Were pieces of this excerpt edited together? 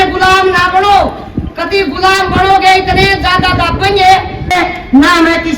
yes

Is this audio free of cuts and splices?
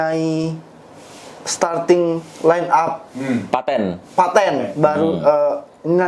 yes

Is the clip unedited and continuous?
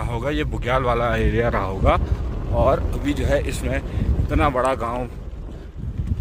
yes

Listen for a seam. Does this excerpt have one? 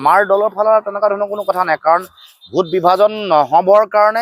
no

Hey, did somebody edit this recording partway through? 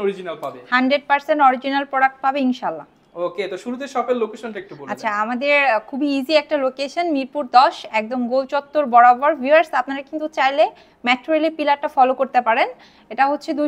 no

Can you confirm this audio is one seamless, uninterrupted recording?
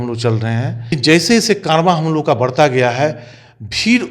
no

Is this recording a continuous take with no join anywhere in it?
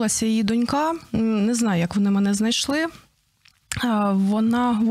yes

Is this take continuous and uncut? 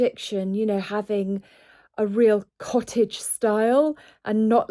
yes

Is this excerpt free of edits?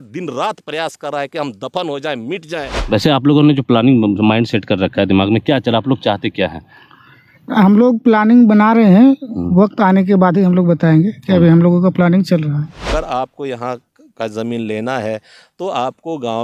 no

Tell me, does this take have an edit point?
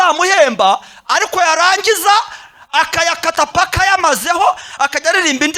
no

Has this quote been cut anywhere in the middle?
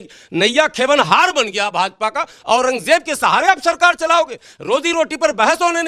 no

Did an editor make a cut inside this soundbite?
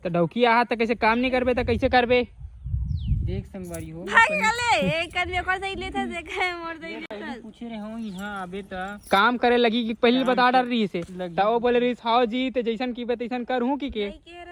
no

